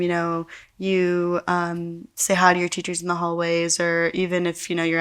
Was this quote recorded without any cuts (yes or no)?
yes